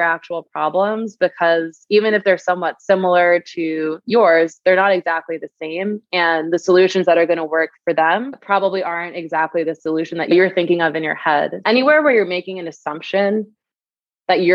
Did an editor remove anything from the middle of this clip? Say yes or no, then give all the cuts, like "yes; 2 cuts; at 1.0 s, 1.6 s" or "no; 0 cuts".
yes; 2 cuts; at 10.3 s, 11.6 s